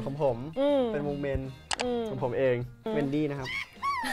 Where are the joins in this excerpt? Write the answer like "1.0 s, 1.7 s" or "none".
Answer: 2.8 s